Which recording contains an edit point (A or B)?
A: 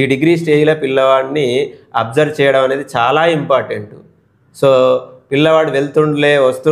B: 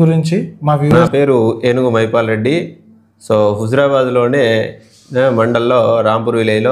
B